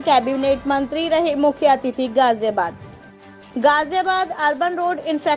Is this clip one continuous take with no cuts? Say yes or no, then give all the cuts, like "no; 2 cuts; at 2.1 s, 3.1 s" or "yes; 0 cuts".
yes; 0 cuts